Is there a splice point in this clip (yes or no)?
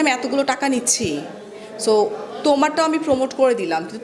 no